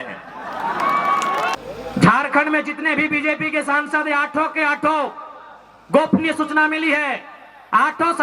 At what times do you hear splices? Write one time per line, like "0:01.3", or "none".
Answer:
0:01.6